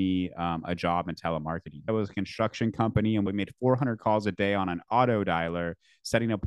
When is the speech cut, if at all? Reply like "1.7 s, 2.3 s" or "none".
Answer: 1.9 s, 3.3 s